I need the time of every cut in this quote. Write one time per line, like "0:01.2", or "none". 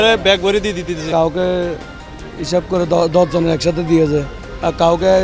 0:01.1